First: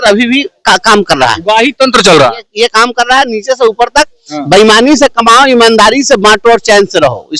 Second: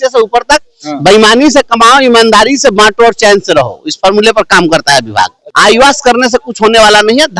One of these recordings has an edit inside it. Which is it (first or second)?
second